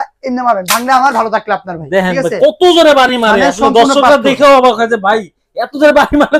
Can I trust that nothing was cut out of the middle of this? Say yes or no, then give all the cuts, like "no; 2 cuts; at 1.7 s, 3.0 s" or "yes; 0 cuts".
yes; 0 cuts